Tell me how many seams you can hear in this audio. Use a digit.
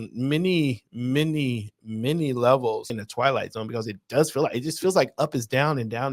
1